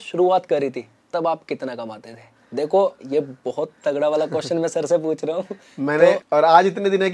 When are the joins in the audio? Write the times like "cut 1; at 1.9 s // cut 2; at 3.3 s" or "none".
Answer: cut 1; at 6.2 s